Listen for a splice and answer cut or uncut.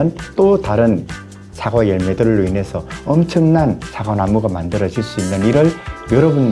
uncut